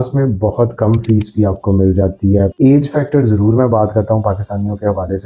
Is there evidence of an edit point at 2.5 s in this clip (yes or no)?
yes